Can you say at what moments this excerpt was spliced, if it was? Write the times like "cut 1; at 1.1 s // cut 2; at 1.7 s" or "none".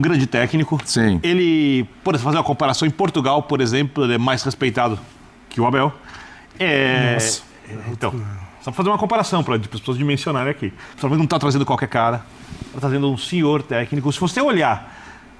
cut 1; at 10.9 s